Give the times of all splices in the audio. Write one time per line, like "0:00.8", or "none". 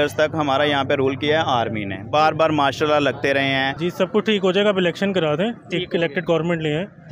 0:03.7